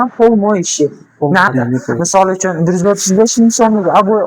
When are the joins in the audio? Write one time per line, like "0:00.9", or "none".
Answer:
0:01.5